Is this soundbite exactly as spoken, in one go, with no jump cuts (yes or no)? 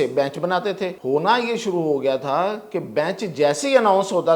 no